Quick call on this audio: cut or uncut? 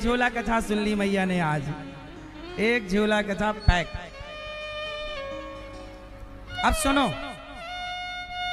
uncut